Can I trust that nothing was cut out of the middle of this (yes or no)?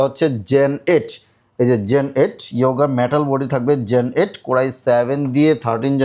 yes